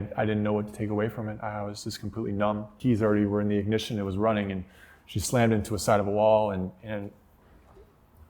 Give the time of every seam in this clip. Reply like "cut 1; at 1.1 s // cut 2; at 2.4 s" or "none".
cut 1; at 2.7 s